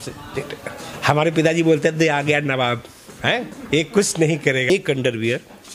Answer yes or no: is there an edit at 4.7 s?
yes